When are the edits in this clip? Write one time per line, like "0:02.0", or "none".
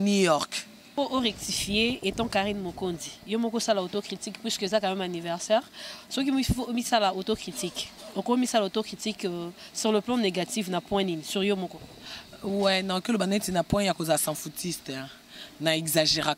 0:00.9